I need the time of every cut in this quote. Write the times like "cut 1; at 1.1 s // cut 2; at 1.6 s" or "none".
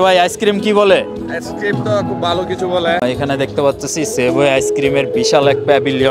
cut 1; at 3.0 s